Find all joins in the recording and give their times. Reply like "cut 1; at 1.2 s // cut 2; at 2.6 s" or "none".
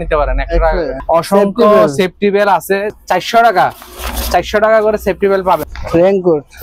cut 1; at 1.0 s // cut 2; at 3.0 s // cut 3; at 5.7 s